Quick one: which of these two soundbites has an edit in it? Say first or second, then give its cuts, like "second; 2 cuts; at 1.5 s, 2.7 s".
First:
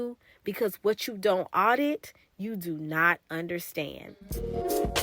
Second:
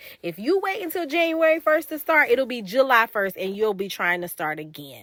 first; 1 cut; at 4.2 s